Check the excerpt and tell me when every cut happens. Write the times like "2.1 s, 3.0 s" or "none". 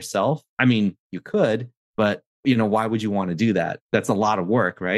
2.4 s, 3.8 s